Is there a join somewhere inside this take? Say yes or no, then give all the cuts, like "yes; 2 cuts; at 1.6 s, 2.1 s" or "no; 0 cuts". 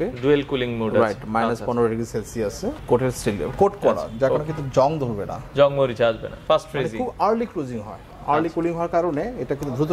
yes; 2 cuts; at 2.7 s, 6.3 s